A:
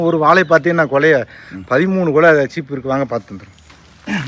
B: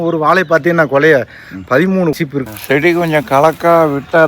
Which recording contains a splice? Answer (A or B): B